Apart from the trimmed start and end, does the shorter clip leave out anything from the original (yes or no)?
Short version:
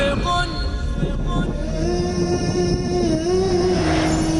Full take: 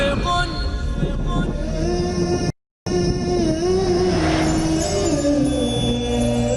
yes